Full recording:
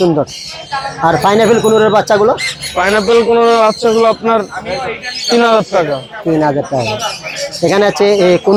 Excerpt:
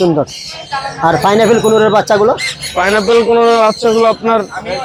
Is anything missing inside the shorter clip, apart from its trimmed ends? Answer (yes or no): no